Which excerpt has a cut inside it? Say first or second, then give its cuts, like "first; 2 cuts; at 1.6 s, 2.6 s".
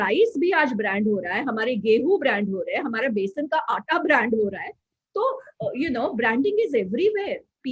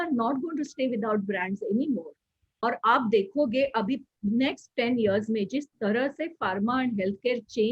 second; 1 cut; at 2.5 s